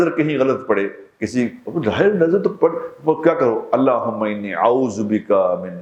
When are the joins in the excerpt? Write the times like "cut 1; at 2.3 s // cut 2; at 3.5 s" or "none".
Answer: none

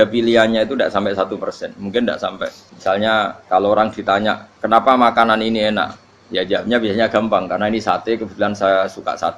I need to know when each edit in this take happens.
cut 1; at 2.7 s // cut 2; at 3.4 s

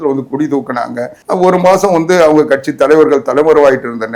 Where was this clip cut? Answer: cut 1; at 1.1 s

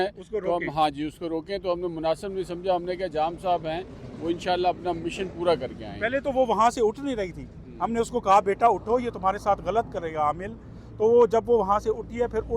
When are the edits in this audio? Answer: none

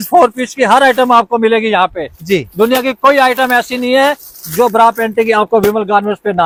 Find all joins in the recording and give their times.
none

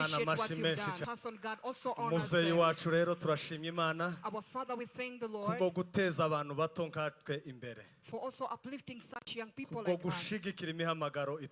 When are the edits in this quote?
cut 1; at 1.0 s

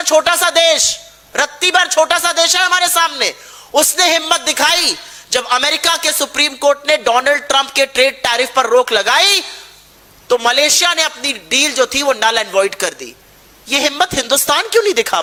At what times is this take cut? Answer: none

